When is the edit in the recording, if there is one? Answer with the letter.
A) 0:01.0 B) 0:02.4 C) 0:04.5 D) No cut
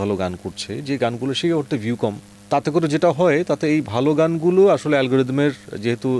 D